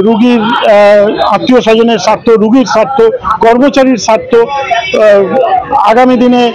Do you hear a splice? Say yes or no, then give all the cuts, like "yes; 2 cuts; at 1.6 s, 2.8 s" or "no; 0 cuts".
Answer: no; 0 cuts